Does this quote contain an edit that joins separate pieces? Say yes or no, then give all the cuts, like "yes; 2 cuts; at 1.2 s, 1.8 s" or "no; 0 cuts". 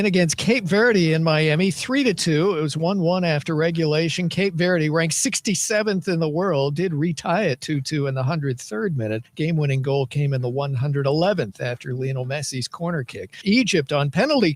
no; 0 cuts